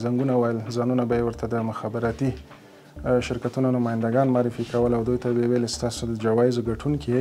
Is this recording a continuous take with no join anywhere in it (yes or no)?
yes